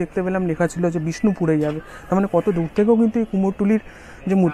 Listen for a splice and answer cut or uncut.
uncut